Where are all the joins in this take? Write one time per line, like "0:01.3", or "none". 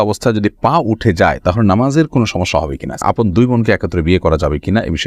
0:03.0